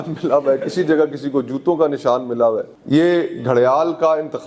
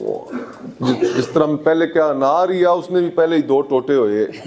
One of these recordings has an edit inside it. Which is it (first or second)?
first